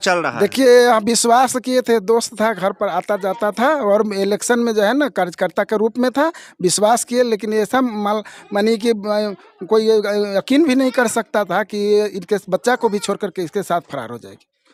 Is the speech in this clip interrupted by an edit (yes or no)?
no